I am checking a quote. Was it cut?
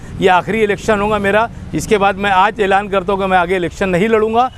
no; 0 cuts

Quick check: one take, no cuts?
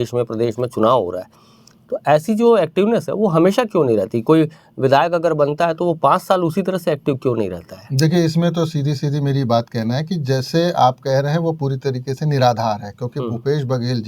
yes; 0 cuts

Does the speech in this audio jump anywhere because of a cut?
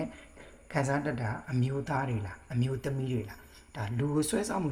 no; 0 cuts

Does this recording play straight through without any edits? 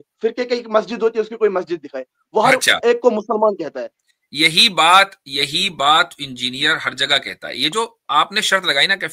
yes; 0 cuts

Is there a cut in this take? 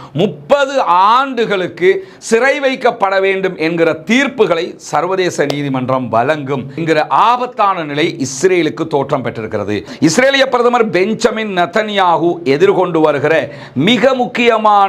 yes; 1 cut; at 9.9 s

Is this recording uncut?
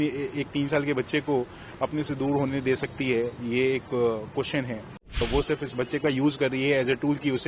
no; 1 cut; at 5.2 s

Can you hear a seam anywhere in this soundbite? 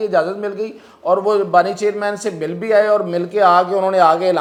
no; 0 cuts

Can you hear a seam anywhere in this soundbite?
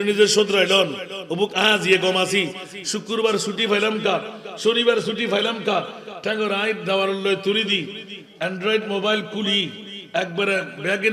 no; 0 cuts

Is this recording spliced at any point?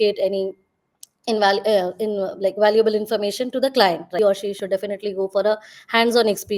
yes; 1 cut; at 4.2 s

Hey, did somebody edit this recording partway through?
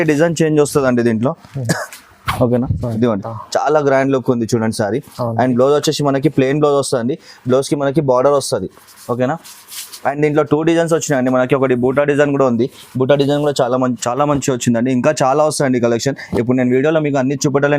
yes; 2 cuts; at 3.3 s, 14.0 s

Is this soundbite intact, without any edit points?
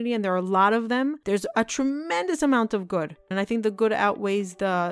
no; 2 cuts; at 1.2 s, 3.3 s

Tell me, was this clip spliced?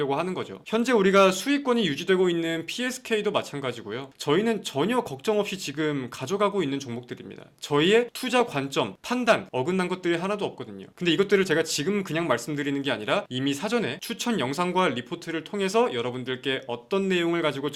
no; 0 cuts

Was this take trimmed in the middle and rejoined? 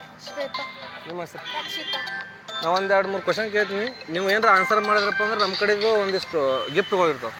no; 0 cuts

